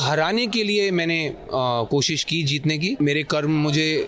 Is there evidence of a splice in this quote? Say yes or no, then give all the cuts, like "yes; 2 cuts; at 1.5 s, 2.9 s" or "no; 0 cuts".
yes; 1 cut; at 3.0 s